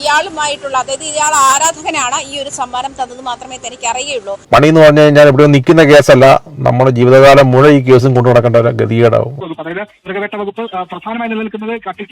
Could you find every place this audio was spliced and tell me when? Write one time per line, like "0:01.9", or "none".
0:04.5
0:09.4